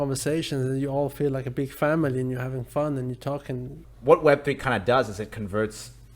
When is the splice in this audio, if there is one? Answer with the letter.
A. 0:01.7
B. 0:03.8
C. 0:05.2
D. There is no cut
B